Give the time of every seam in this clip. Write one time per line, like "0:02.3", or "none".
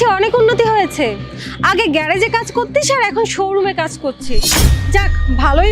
none